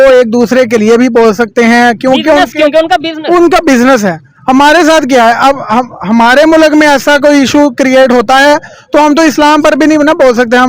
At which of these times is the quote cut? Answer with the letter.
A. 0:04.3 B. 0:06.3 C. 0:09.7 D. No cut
D